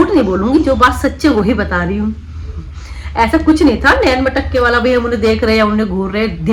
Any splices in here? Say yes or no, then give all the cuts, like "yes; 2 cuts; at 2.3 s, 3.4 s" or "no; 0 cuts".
no; 0 cuts